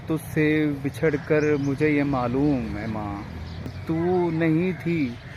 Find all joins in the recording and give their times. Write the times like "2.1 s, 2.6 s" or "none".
3.7 s